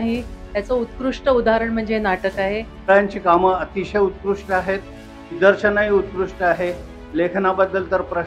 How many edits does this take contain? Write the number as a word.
two